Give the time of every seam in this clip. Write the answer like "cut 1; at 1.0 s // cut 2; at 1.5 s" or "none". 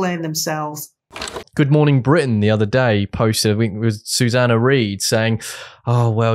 cut 1; at 1.3 s